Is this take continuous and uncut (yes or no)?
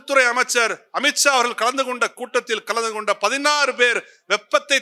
yes